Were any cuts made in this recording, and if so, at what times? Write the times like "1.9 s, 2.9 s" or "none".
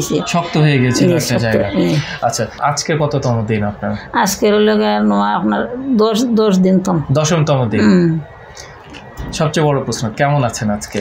2.5 s